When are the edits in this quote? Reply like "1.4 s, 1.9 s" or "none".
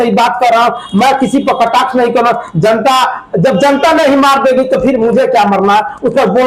none